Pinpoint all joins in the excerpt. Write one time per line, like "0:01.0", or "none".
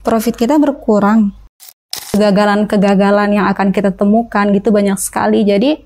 0:01.9